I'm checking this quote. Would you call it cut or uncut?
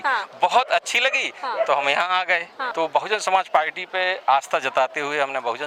cut